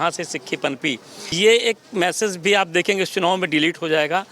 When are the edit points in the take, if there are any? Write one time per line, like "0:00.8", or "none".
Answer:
0:01.2